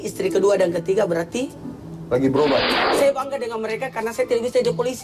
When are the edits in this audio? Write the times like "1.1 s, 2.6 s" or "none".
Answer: 2.7 s